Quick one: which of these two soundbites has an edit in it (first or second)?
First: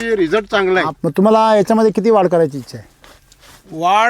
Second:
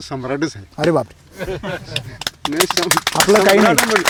first